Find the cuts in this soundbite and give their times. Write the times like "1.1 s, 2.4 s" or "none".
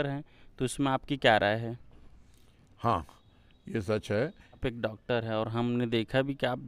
4.6 s